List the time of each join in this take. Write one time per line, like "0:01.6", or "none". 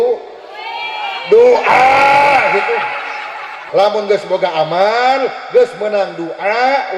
0:03.6